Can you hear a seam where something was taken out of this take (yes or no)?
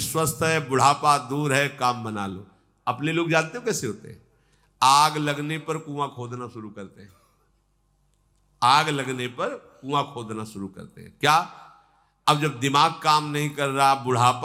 no